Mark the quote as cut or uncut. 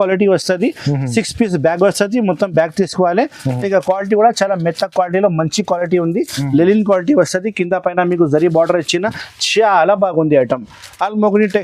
cut